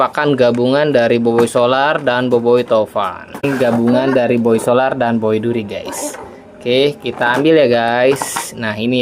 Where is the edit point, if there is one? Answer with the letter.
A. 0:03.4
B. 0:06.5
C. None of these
A